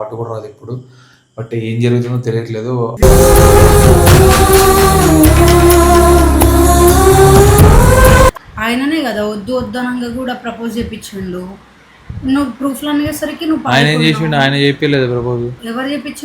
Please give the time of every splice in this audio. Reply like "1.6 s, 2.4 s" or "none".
8.5 s